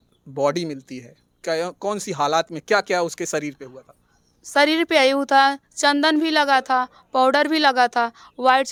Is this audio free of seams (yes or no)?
yes